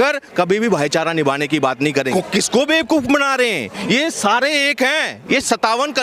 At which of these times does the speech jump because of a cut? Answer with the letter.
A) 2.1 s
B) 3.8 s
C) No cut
A